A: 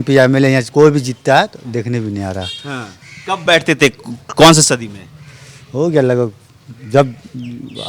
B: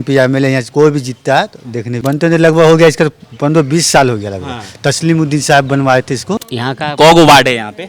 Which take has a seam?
B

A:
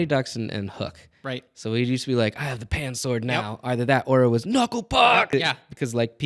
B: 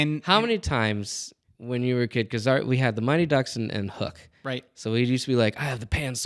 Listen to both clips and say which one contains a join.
A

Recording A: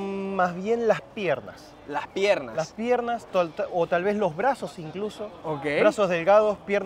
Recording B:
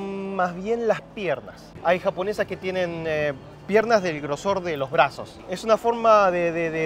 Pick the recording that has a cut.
B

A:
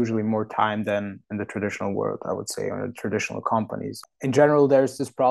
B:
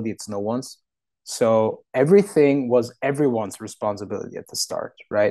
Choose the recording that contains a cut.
A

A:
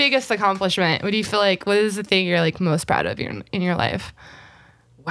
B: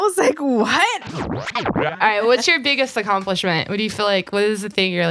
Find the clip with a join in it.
B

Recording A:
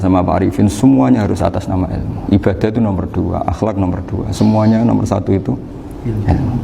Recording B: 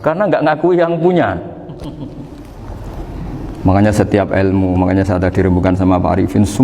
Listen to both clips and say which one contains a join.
B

